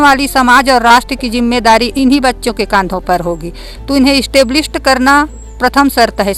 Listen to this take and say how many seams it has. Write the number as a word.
zero